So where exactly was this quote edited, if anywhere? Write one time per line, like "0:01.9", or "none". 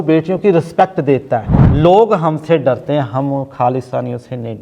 0:01.6